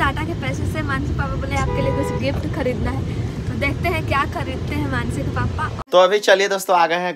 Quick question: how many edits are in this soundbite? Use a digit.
1